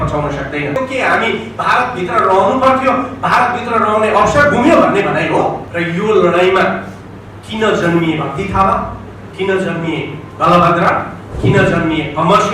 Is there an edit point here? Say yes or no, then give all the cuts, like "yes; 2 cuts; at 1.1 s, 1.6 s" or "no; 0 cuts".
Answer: yes; 2 cuts; at 0.8 s, 5.7 s